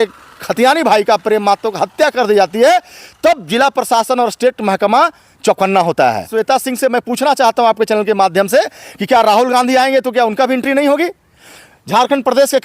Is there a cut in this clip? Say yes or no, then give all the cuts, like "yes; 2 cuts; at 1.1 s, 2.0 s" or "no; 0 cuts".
yes; 1 cut; at 6.3 s